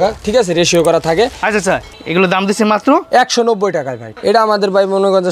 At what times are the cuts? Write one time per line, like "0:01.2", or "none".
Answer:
0:01.9
0:04.0